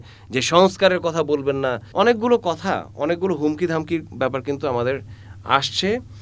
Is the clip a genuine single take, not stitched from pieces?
no; 1 cut; at 1.8 s

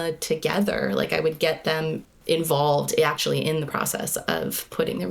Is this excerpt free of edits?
no; 1 cut; at 2.1 s

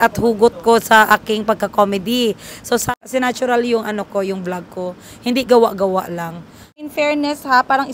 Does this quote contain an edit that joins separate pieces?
yes; 2 cuts; at 2.9 s, 6.9 s

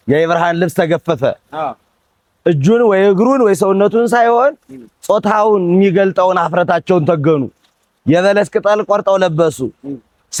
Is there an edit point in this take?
no; 0 cuts

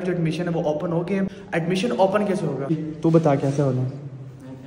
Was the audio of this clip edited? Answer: no; 0 cuts

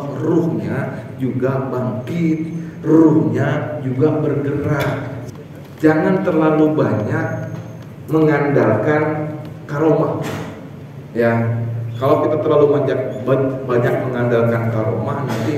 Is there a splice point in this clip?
yes; 1 cut; at 5.2 s

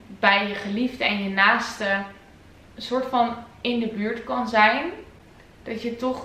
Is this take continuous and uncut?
yes; 0 cuts

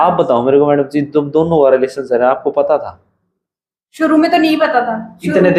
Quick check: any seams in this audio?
no; 0 cuts

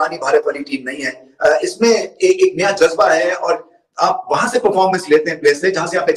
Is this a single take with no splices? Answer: yes; 0 cuts

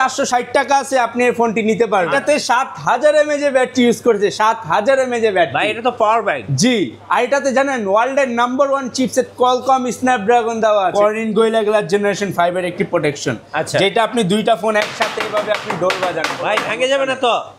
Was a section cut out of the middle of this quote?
yes; 2 cuts; at 2.1 s, 10.9 s

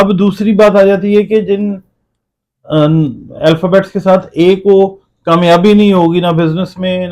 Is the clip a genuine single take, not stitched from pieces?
yes; 0 cuts

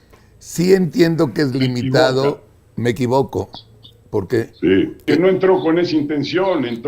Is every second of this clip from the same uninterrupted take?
no; 1 cut; at 5.0 s

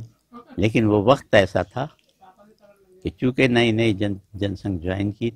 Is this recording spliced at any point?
no; 0 cuts

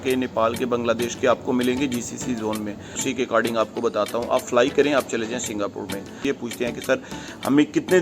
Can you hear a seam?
yes; 2 cuts; at 3.1 s, 6.2 s

